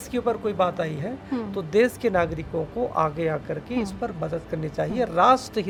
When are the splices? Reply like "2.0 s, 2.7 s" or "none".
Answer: none